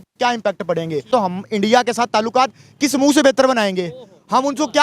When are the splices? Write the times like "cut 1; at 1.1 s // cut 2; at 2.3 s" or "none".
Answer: cut 1; at 1.1 s